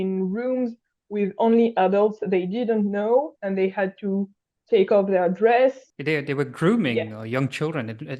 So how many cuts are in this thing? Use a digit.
1